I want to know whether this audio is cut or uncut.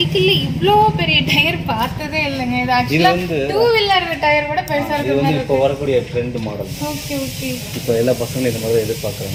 uncut